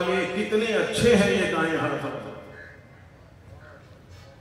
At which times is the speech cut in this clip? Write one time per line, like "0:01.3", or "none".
none